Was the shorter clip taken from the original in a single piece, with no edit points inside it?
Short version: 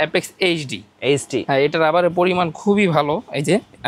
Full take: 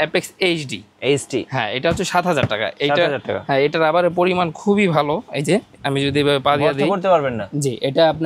no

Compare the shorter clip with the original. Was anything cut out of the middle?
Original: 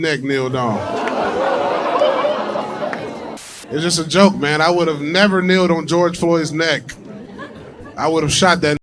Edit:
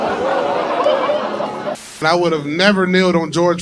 yes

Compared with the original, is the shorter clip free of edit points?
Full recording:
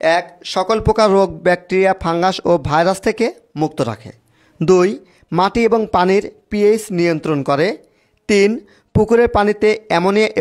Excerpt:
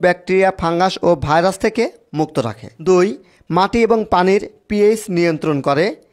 no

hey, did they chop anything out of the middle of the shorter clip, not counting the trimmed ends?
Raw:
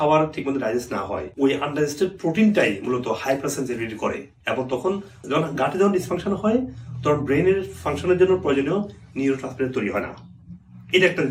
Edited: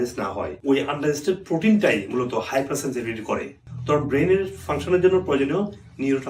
yes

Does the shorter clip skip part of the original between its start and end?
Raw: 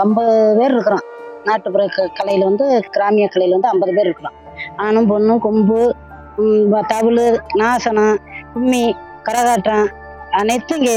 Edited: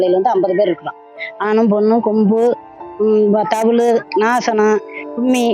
no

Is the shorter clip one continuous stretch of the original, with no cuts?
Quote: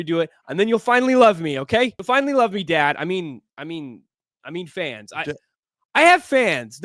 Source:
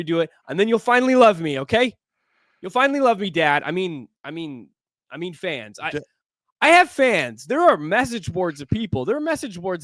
no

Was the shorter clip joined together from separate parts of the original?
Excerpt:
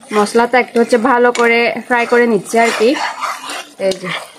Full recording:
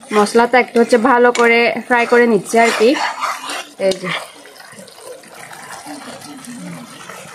no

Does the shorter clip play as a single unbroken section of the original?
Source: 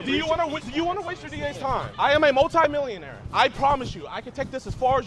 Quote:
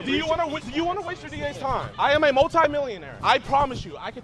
no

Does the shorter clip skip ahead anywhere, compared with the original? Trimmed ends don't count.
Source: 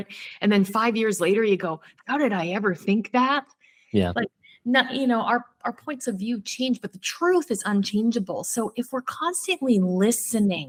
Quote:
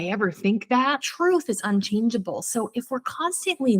yes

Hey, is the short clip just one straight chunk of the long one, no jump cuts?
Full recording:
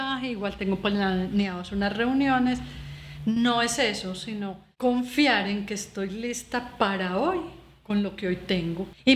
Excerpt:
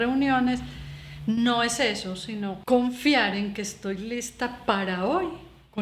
no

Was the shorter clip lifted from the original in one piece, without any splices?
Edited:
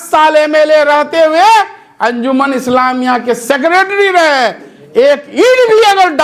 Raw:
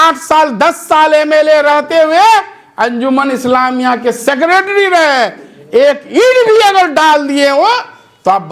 yes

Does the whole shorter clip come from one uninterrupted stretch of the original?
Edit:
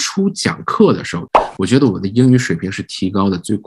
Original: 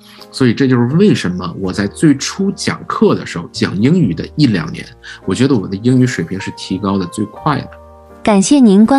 no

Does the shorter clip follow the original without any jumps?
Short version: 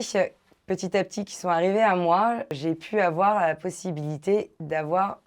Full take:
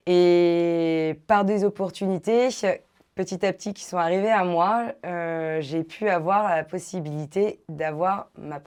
no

